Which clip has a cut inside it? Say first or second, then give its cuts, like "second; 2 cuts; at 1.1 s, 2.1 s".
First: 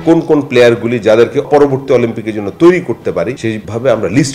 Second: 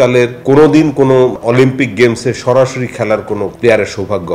first; 1 cut; at 1.5 s